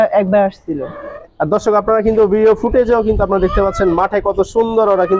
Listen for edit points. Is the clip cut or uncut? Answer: cut